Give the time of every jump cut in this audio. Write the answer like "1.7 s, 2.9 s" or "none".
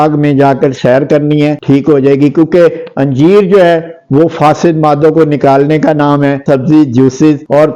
1.6 s, 6.4 s

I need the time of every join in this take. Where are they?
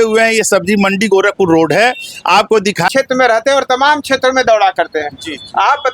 2.9 s

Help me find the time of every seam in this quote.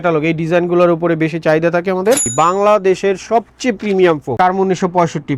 2.2 s, 4.4 s

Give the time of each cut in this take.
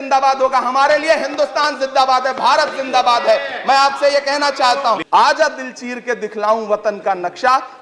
5.0 s

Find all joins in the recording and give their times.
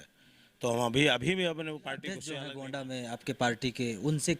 2.2 s

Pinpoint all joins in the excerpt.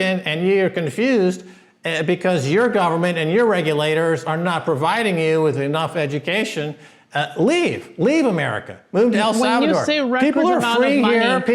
none

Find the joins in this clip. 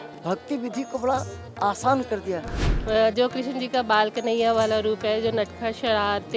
2.7 s

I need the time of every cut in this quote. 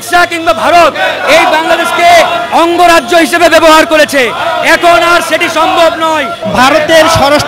6.4 s

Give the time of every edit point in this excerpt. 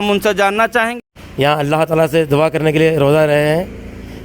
0.9 s

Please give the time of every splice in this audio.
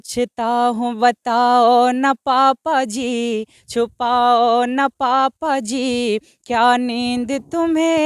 none

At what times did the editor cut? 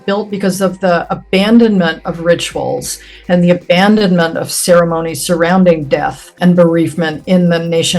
6.3 s

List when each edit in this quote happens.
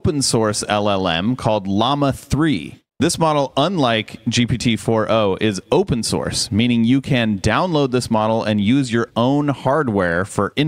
none

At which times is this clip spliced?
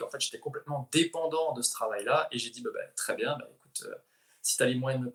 none

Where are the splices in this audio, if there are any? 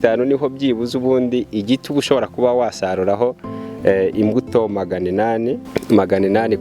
5.6 s

